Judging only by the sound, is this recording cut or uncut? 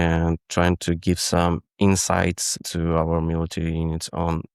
cut